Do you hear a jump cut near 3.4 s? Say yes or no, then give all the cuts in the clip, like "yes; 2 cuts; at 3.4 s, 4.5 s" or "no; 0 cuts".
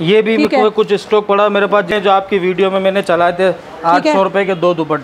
no; 1 cut; at 1.9 s